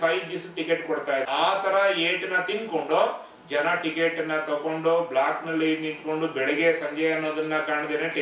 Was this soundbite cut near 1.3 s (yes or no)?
yes